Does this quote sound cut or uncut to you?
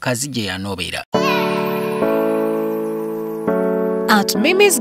cut